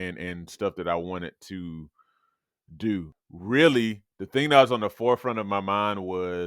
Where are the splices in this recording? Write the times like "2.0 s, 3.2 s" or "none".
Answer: 3.1 s